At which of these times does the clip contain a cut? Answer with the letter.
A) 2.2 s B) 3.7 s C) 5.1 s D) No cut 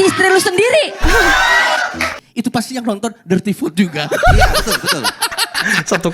A